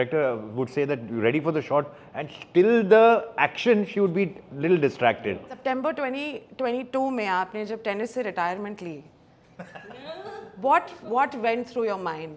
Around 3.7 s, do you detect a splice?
no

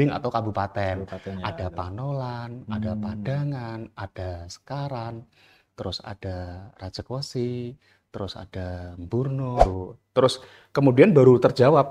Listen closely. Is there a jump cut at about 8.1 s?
no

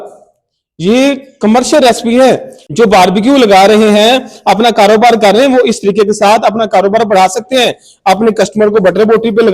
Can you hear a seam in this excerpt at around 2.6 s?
yes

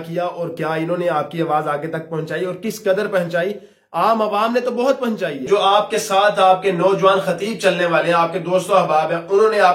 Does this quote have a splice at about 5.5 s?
yes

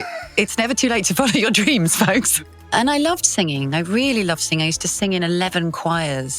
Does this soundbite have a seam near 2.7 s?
yes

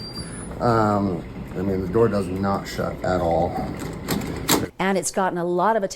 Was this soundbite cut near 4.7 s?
yes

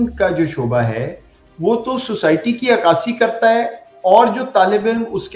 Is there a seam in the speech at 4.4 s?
no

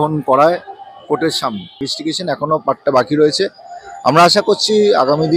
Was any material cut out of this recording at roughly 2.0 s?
yes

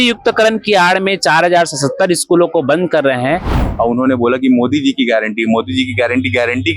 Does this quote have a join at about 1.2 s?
no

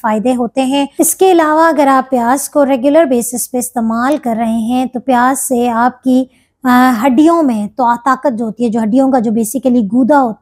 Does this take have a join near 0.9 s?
yes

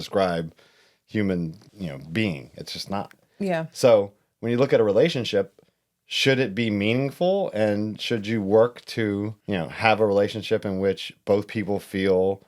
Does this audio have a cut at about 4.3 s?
no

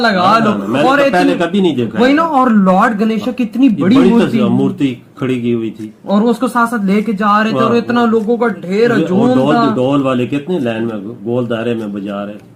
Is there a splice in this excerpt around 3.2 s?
no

